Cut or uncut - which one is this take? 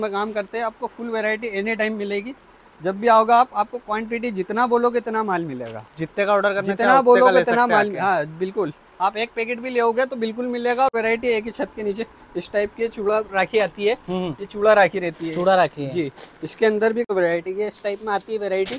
cut